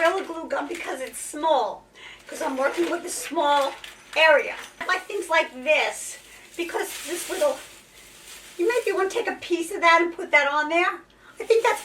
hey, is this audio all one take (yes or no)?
no